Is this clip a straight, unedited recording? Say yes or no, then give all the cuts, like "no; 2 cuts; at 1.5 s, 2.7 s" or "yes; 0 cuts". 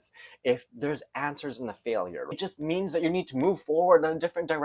no; 1 cut; at 2.3 s